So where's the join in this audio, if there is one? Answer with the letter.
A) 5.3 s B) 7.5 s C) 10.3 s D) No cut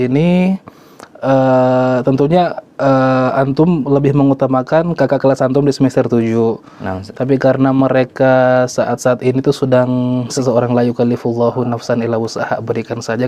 C